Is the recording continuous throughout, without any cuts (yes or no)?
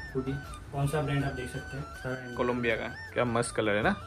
no